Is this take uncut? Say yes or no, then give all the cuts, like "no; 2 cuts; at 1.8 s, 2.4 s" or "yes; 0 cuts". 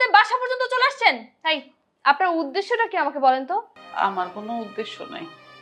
no; 1 cut; at 3.7 s